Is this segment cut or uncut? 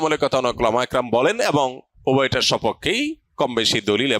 cut